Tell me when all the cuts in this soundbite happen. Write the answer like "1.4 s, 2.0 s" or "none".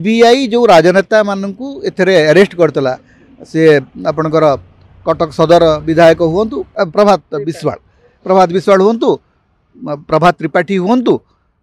6.7 s